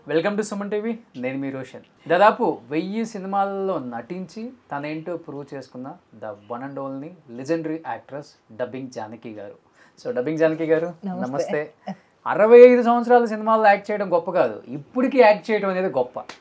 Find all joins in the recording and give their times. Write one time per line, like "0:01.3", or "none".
0:01.9
0:12.1